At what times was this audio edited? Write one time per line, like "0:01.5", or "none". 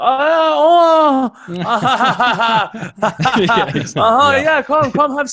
none

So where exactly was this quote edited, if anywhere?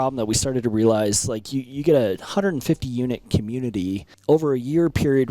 0:04.1

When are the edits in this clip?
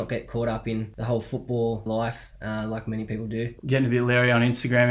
0:00.9
0:01.8
0:03.6

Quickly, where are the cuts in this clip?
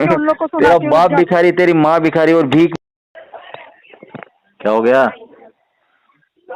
none

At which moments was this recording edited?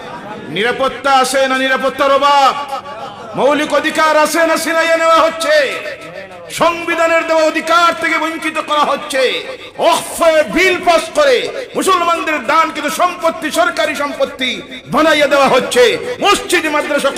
none

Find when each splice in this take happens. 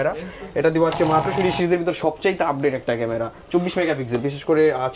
0:01.3

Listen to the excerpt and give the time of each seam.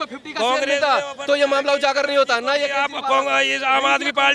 none

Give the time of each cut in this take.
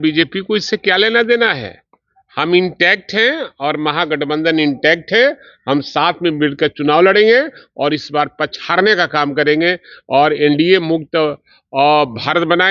none

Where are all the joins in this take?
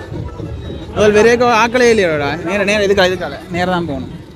none

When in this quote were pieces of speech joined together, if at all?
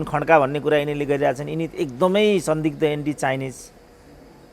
none

